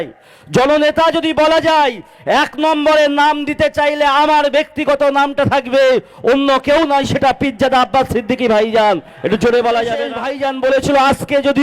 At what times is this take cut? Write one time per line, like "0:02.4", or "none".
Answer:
0:10.2